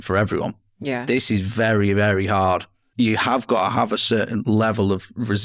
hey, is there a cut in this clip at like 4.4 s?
yes; 2 cuts; at 2.8 s, 4.4 s

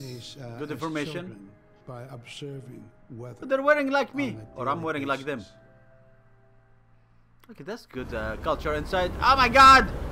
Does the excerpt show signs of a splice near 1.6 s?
yes; 1 cut; at 1.6 s

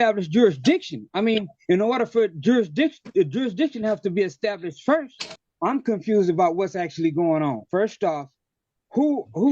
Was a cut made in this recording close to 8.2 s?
no; 1 cut; at 5.4 s

